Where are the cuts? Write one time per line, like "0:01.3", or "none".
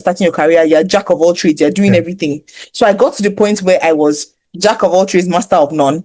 none